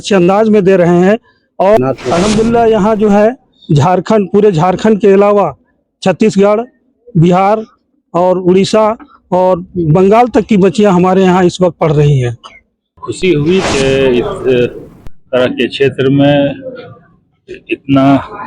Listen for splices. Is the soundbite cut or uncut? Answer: cut